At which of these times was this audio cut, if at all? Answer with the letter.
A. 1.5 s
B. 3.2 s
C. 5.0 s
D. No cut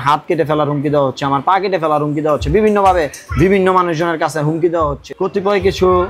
C